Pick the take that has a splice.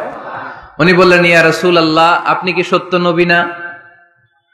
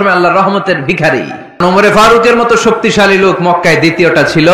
second; 1 cut; at 1.6 s

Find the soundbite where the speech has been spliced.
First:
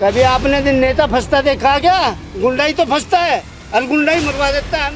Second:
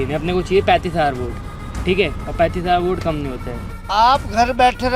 second; 1 cut; at 3.8 s

